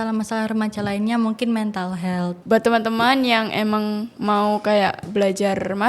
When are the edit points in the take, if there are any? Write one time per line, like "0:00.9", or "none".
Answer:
0:02.4